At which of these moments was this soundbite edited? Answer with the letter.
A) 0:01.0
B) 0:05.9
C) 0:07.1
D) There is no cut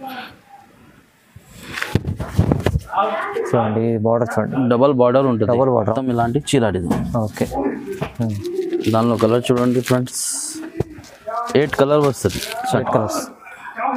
B